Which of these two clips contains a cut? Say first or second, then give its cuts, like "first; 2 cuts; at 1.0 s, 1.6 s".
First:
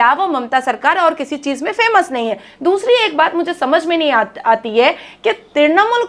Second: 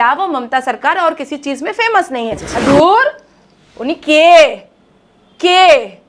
second; 1 cut; at 2.5 s